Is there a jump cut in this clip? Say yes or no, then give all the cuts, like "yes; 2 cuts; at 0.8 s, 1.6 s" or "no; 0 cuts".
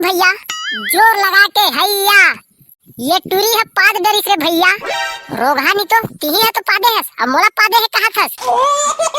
yes; 1 cut; at 8.3 s